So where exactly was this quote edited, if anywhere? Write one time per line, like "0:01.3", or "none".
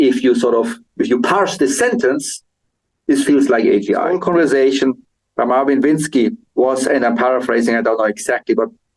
0:04.1